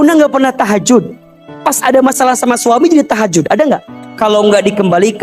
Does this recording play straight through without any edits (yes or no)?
no